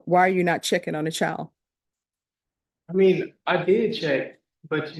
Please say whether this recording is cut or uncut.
uncut